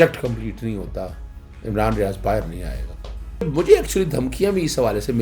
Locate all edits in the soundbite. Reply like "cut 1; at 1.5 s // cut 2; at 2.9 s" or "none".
cut 1; at 3.5 s